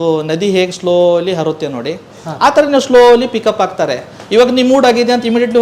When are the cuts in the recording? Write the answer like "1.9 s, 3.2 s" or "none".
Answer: none